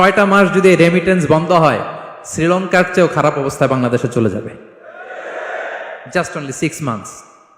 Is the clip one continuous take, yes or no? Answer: yes